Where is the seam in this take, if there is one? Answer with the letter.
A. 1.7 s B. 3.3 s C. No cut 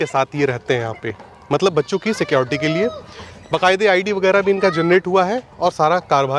C